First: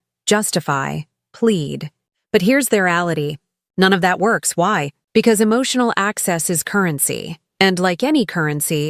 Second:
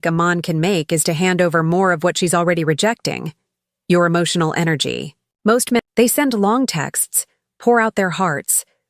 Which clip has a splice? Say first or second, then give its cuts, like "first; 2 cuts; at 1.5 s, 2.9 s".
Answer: second; 1 cut; at 5.8 s